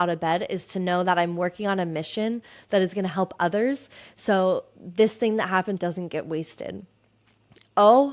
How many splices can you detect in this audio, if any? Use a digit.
1